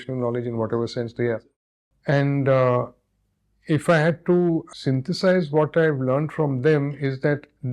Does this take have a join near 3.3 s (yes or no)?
no